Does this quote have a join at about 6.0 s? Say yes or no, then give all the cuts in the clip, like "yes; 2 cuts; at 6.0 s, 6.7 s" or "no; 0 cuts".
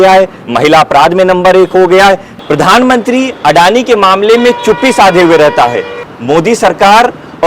yes; 2 cuts; at 2.3 s, 6.0 s